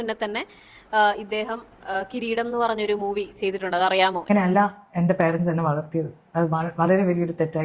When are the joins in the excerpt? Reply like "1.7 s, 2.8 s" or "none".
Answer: 4.3 s